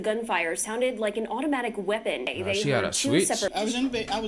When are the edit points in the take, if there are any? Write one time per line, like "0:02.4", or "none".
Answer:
0:02.3
0:03.5

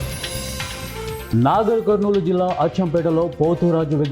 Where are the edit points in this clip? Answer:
0:01.2

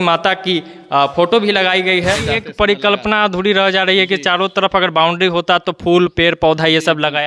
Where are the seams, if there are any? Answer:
0:02.2

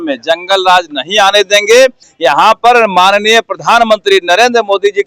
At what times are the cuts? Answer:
0:02.1

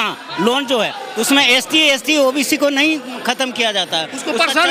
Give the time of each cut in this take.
none

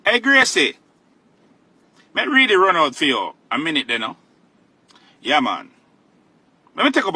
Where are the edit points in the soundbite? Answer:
none

